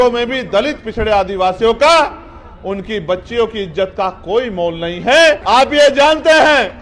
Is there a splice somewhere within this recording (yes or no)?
yes